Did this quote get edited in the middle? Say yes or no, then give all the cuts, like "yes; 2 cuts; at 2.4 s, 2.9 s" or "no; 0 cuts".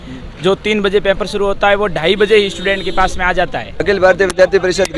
yes; 1 cut; at 3.7 s